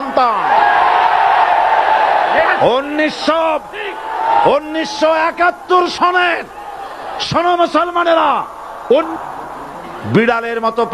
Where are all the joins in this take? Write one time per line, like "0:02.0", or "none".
0:09.1